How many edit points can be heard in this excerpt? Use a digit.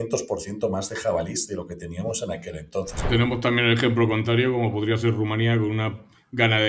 1